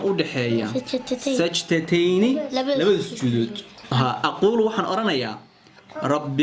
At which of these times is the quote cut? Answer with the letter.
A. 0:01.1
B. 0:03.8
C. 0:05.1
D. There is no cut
B